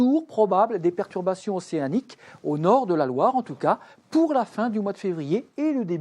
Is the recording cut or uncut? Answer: cut